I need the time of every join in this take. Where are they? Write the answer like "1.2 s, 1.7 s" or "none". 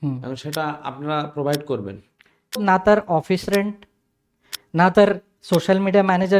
2.6 s